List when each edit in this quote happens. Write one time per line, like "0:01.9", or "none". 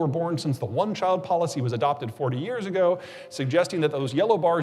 none